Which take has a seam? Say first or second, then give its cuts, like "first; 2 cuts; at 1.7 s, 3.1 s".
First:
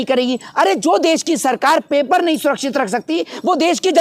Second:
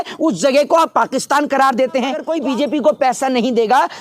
second; 1 cut; at 2.3 s